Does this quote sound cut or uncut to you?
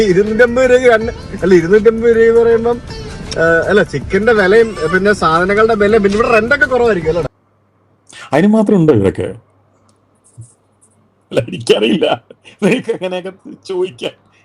cut